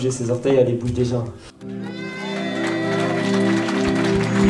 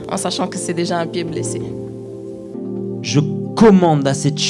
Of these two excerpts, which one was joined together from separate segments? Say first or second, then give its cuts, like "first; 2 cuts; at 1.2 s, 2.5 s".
second; 1 cut; at 2.5 s